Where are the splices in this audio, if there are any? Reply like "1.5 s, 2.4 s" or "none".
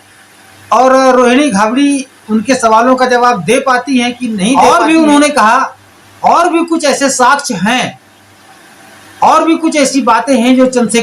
4.6 s